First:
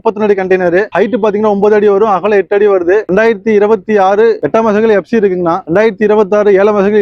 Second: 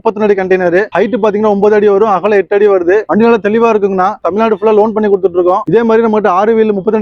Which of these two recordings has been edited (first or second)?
second